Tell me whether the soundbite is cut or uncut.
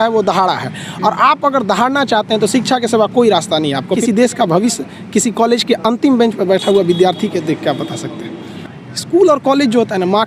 cut